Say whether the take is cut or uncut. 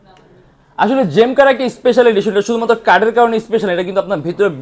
uncut